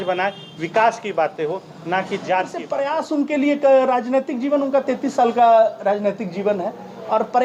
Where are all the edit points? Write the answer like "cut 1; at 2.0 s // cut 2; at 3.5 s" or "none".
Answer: cut 1; at 2.8 s